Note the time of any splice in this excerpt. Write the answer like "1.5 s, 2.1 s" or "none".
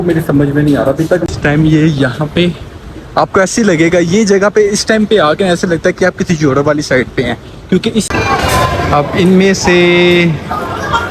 1.3 s, 8.1 s